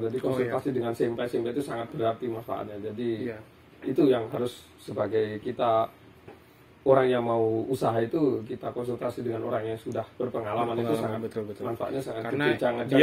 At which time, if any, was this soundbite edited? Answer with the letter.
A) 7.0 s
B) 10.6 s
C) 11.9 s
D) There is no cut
D